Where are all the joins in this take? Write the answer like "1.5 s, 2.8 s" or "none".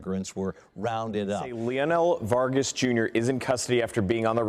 1.5 s